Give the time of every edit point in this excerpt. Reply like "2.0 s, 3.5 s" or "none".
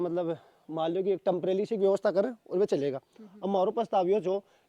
none